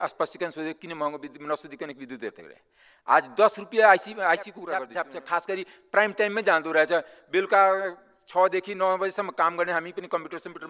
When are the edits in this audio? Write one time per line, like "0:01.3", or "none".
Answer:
0:04.8